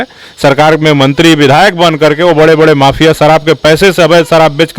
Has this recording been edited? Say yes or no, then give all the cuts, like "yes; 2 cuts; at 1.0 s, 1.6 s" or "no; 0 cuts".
no; 0 cuts